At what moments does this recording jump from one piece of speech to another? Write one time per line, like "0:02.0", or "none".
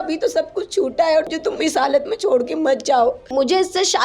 0:01.3
0:03.2